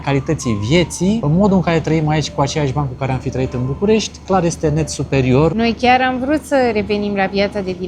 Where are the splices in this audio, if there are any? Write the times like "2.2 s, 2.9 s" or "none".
1.2 s, 5.5 s